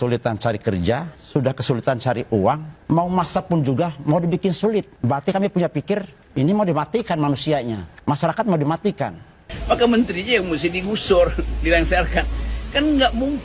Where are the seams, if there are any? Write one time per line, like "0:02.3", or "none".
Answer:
0:01.1
0:02.7
0:04.9
0:06.2
0:07.9
0:09.5